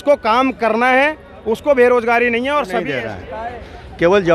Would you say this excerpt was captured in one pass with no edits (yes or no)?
no